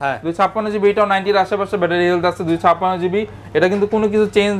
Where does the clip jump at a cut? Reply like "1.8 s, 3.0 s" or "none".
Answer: none